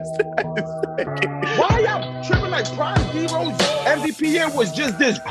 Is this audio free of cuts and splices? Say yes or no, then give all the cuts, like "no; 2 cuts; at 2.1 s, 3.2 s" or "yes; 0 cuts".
no; 1 cut; at 1.5 s